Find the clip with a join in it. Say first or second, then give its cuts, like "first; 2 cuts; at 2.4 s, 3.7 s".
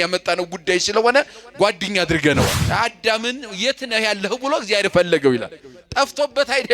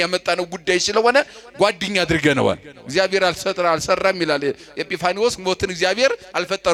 first; 1 cut; at 2.6 s